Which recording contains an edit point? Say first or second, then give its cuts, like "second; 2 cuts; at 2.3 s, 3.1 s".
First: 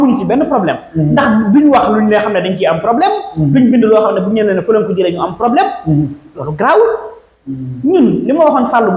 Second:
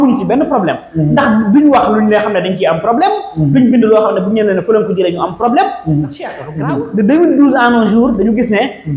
second; 1 cut; at 6.5 s